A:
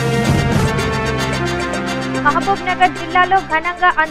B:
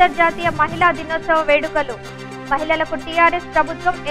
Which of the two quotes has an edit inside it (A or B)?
A